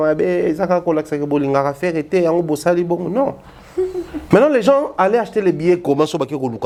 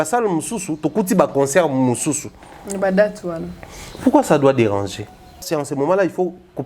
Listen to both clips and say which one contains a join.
second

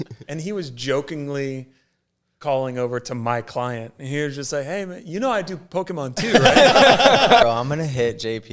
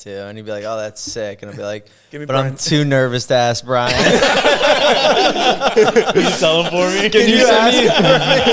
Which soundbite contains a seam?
first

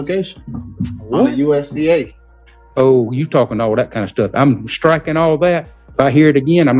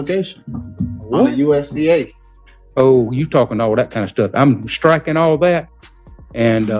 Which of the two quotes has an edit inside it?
first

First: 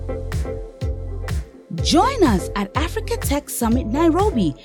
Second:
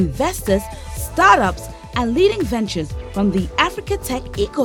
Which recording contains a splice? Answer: first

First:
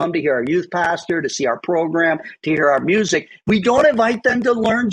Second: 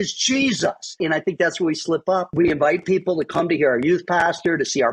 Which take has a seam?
second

